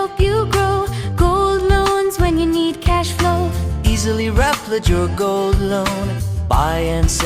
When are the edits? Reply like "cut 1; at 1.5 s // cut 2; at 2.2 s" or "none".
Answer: none

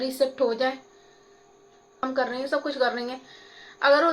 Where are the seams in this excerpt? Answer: cut 1; at 2.1 s

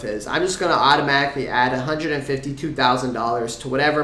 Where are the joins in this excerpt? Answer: none

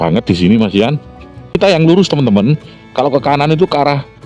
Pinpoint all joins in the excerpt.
cut 1; at 1.6 s

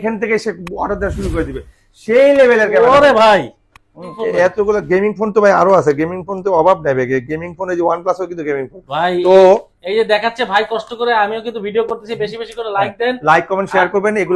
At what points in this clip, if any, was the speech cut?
cut 1; at 4.1 s

